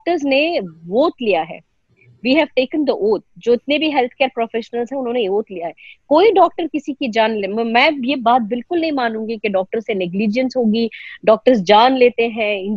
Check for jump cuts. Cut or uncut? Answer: uncut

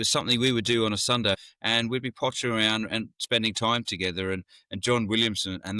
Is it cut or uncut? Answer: cut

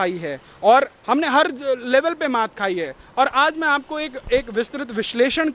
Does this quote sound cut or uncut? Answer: uncut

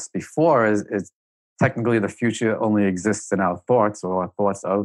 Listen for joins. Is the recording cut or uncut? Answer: cut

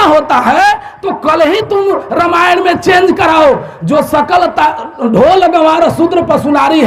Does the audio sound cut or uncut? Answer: uncut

